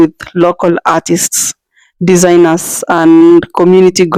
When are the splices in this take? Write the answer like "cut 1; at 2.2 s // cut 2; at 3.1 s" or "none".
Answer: none